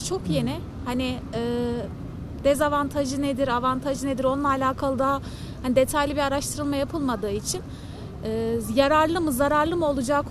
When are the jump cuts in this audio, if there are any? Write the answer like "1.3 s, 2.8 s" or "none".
none